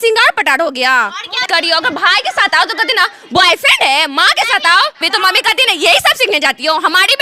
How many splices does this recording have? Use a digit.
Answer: 2